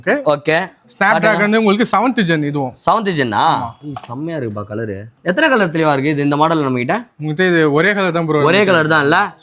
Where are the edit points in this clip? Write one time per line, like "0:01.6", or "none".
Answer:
none